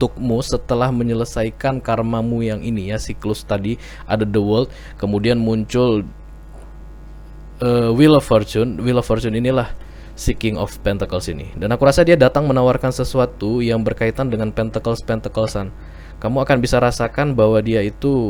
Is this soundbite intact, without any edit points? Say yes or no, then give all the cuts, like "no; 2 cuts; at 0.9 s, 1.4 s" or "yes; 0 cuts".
yes; 0 cuts